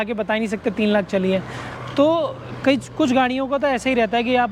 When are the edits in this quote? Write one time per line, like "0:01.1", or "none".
none